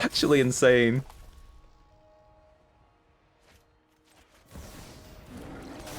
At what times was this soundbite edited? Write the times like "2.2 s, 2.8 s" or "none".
1.0 s